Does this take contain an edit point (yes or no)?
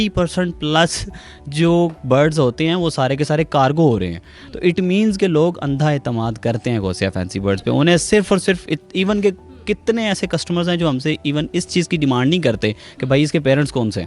no